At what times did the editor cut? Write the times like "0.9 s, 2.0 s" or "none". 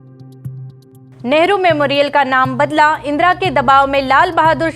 1.2 s